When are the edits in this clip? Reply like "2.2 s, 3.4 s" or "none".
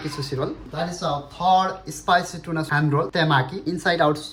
none